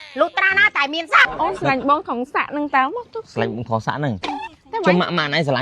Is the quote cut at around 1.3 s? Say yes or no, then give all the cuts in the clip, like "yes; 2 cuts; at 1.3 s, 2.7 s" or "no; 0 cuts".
yes; 1 cut; at 1.3 s